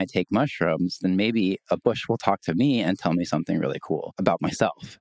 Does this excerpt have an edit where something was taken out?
yes; 1 cut; at 4.1 s

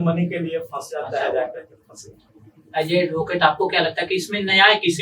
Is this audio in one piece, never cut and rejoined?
yes; 0 cuts

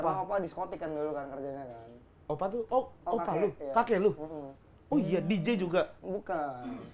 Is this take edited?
no; 0 cuts

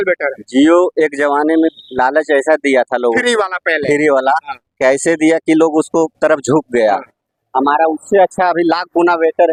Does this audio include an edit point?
no; 0 cuts

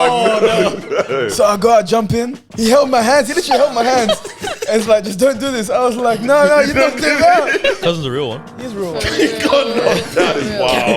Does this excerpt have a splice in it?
yes; 2 cuts; at 2.5 s, 7.8 s

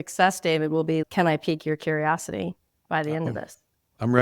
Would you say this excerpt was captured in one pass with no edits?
no; 1 cut; at 1.0 s

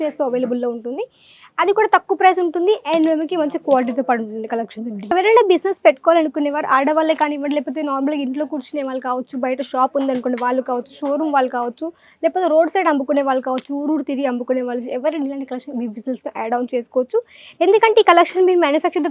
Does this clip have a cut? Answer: yes; 1 cut; at 5.1 s

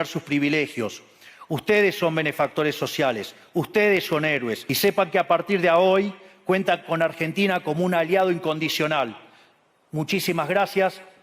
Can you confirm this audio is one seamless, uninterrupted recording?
no; 1 cut; at 4.6 s

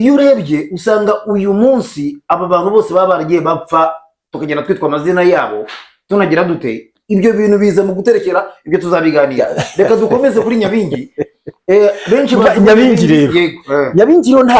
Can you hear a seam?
no; 0 cuts

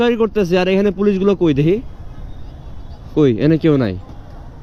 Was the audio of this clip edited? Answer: no; 0 cuts

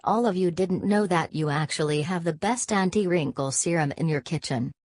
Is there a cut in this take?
yes; 1 cut; at 3.8 s

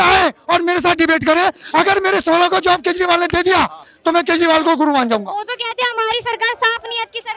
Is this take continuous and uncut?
yes; 0 cuts

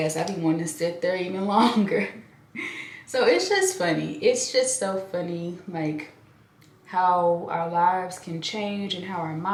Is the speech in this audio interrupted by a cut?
no; 0 cuts

